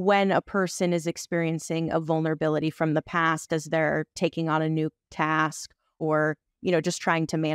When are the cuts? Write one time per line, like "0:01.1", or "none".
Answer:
0:05.9